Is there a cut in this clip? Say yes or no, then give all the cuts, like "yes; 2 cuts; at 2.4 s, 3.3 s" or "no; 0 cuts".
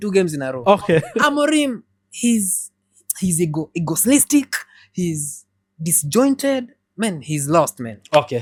no; 0 cuts